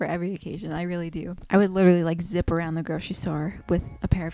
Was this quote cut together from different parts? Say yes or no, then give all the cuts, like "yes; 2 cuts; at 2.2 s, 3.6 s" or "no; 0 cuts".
no; 0 cuts